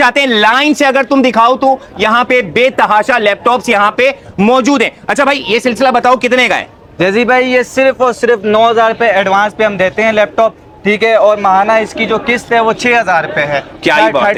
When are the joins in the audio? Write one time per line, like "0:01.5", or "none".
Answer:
none